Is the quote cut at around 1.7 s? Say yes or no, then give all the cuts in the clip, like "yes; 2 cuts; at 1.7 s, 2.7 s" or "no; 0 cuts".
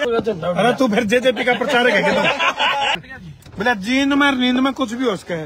no; 1 cut; at 3.0 s